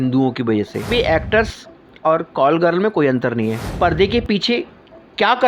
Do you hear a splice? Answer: yes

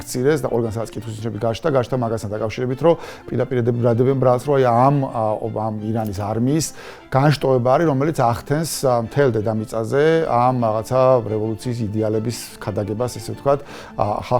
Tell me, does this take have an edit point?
no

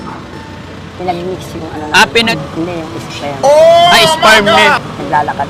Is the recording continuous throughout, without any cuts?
no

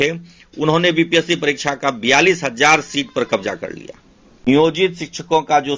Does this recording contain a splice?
yes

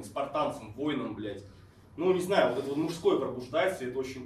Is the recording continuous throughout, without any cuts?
yes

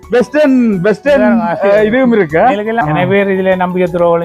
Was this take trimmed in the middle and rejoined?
yes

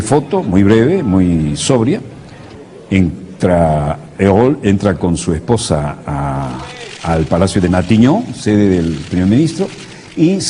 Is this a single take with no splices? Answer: no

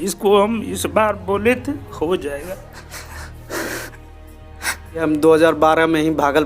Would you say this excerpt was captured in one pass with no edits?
no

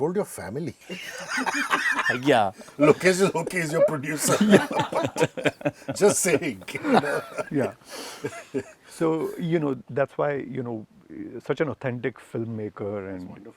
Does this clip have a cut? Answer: no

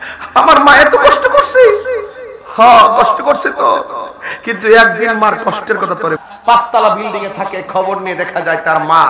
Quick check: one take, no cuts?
no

